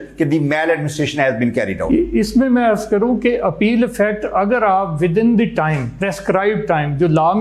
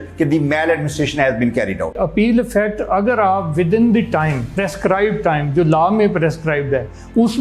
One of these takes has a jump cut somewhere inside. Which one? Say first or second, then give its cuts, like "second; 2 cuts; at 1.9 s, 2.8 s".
second; 1 cut; at 1.9 s